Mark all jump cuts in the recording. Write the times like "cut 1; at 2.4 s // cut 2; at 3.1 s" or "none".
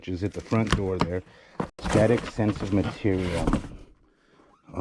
cut 1; at 1.7 s